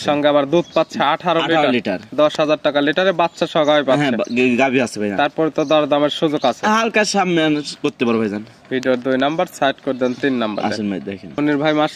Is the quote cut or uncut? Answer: uncut